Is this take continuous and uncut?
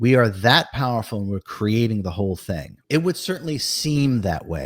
no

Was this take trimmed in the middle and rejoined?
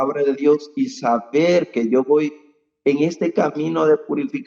no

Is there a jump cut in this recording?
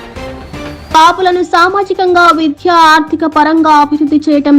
yes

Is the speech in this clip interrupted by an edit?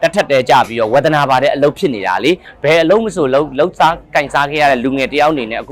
yes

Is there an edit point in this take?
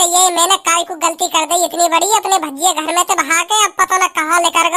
no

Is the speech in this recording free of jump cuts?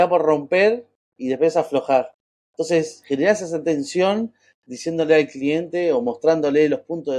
yes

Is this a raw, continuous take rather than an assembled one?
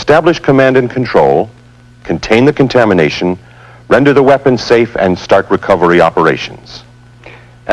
no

